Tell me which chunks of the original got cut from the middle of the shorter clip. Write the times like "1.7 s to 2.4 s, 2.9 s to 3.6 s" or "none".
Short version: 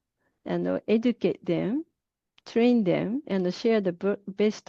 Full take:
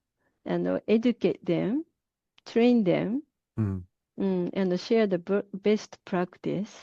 3.3 s to 4.5 s